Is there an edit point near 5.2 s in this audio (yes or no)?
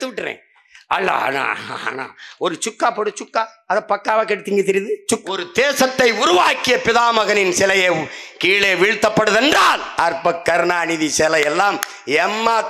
yes